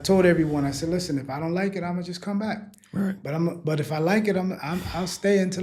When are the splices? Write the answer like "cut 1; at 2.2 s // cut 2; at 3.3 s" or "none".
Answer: none